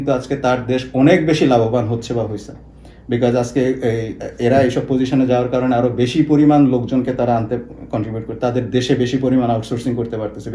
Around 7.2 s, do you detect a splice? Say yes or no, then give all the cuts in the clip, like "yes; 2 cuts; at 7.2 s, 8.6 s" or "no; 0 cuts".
no; 0 cuts